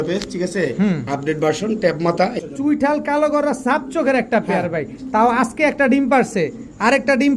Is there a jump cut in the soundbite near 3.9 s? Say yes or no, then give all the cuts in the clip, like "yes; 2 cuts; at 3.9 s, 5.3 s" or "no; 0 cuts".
no; 1 cut; at 2.4 s